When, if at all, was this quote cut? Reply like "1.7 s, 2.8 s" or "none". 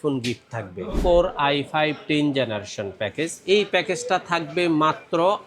1.0 s

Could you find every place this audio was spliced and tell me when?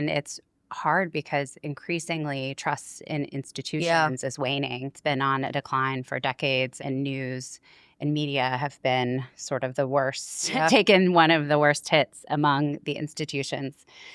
4.9 s, 6.7 s

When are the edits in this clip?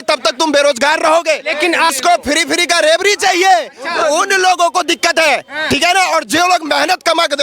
1.9 s

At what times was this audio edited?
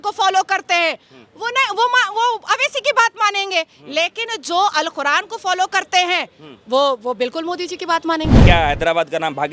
8.4 s

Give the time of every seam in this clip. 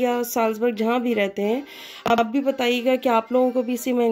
none

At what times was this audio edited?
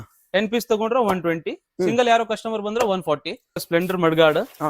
3.6 s

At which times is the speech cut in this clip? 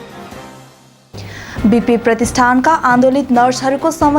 0.9 s

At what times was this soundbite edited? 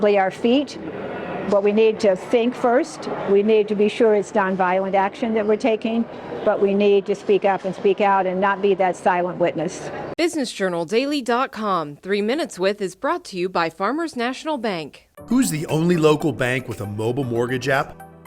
10.0 s

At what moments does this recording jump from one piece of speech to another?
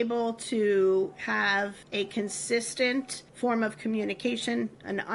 1.8 s, 3.2 s

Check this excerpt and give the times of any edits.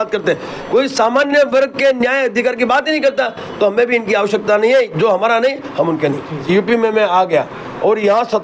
6.4 s

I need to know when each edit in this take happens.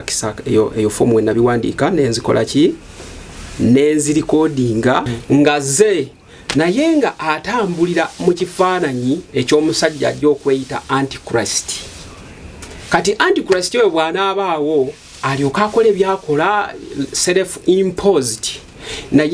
5.1 s

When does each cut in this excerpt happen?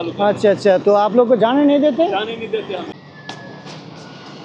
2.9 s

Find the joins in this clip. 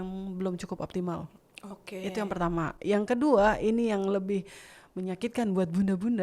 none

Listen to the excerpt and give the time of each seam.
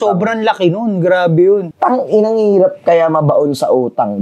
1.7 s

